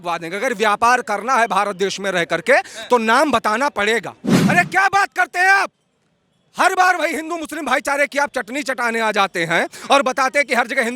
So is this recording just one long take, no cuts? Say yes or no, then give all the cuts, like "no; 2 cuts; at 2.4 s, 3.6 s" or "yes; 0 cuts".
no; 1 cut; at 4.4 s